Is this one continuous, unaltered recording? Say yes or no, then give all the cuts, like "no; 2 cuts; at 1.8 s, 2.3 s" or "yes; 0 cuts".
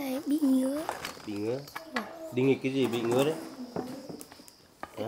yes; 0 cuts